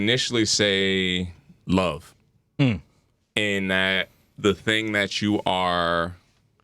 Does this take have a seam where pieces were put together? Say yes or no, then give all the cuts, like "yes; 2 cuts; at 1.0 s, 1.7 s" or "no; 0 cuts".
yes; 1 cut; at 1.5 s